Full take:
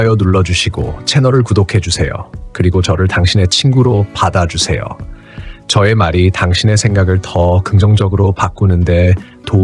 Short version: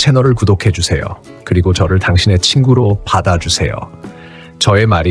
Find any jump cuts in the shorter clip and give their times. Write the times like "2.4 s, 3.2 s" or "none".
none